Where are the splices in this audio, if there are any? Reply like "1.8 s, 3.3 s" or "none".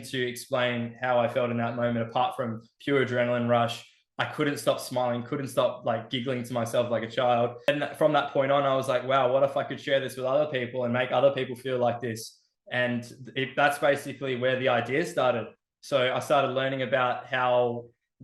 7.7 s